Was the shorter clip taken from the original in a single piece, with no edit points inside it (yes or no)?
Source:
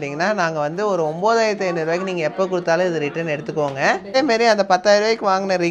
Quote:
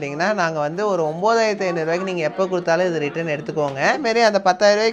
no